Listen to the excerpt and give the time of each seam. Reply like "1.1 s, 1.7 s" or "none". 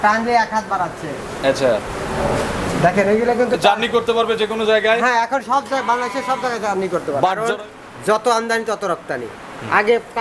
7.4 s

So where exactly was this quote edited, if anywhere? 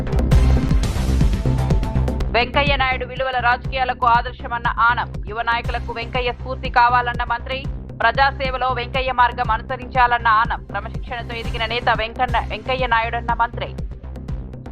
2.2 s

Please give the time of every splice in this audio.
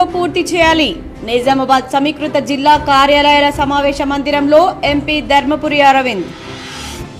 none

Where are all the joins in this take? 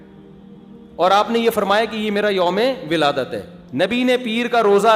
3.6 s

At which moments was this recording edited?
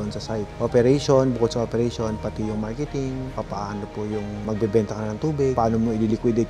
none

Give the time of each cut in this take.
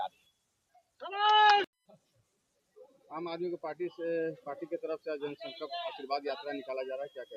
none

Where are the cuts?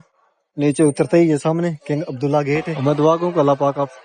2.7 s

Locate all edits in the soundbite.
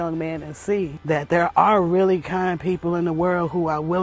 1.0 s

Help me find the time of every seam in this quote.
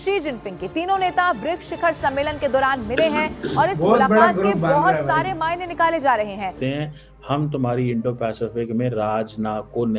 6.6 s

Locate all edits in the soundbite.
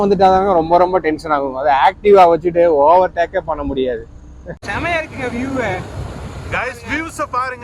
4.6 s

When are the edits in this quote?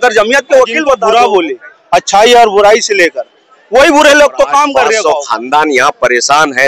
1.0 s, 5.0 s

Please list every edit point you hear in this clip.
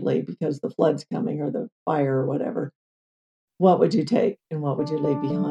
none

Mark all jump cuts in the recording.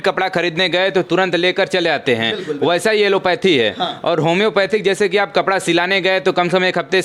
none

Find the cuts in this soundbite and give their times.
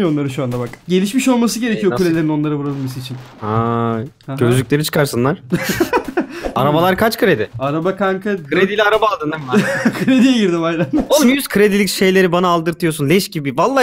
6.5 s, 11.1 s

